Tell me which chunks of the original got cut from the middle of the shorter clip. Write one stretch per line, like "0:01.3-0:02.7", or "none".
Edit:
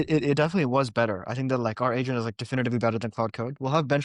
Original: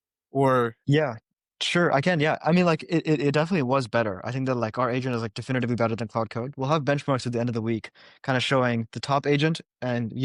none